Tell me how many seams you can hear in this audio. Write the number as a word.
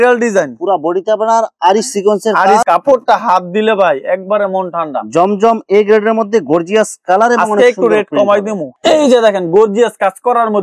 two